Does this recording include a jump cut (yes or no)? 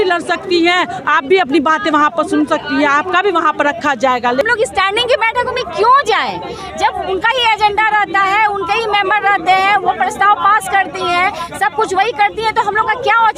yes